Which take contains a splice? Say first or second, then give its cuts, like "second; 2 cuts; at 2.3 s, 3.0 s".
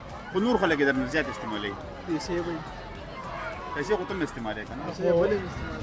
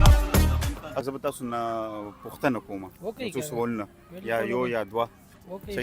second; 1 cut; at 1.0 s